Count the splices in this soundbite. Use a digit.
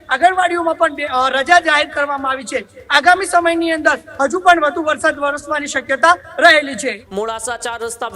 0